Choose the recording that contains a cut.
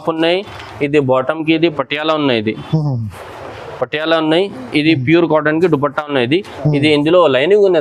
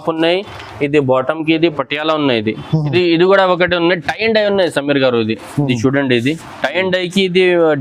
second; 1 cut; at 2.9 s

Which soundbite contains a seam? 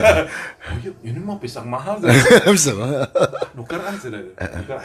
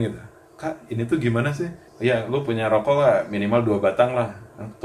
second; 1 cut; at 1.8 s

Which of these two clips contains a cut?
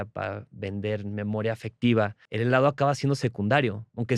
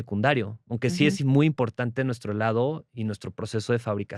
first; 1 cut; at 2.2 s

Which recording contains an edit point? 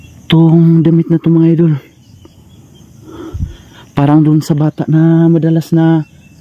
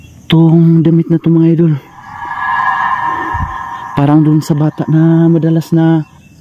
second; 2 cuts; at 2.4 s, 3.6 s

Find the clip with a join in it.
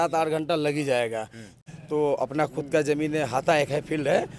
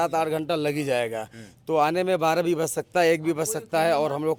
first; 1 cut; at 1.6 s

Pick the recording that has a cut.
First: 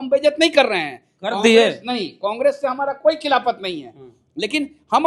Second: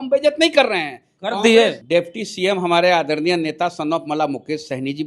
second; 1 cut; at 1.8 s

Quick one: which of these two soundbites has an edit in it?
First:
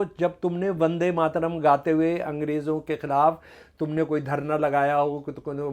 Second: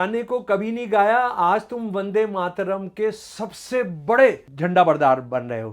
second; 1 cut; at 4.5 s

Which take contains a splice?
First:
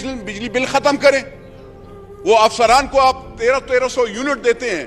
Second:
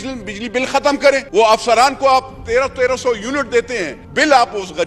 second; 2 cuts; at 1.3 s, 4.0 s

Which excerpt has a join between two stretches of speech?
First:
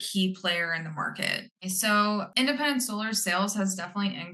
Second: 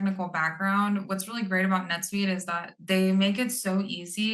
first; 2 cuts; at 1.5 s, 2.3 s

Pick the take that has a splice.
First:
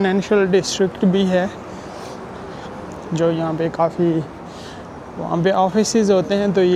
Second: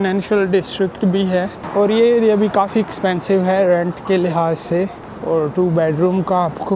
second; 2 cuts; at 1.6 s, 5.1 s

